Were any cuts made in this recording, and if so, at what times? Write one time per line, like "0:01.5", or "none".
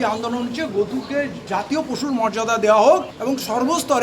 0:01.4
0:03.1